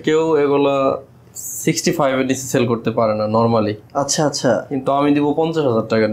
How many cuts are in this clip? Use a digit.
0